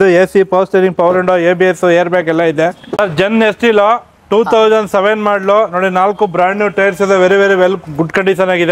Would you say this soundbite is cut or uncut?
cut